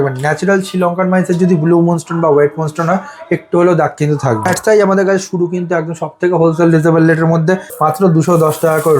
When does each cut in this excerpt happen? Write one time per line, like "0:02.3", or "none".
0:04.5
0:07.7